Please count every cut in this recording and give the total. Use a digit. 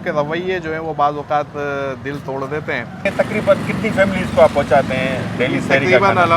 1